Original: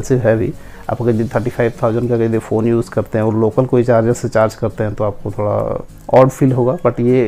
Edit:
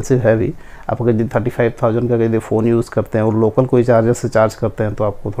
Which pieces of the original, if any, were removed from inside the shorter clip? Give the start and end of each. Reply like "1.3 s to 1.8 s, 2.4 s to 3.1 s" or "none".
none